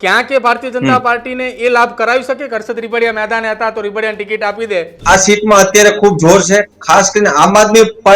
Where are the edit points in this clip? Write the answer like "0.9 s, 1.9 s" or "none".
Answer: 5.0 s